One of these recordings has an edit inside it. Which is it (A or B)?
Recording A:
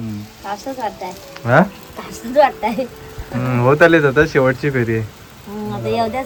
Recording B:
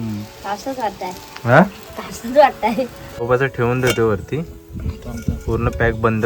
B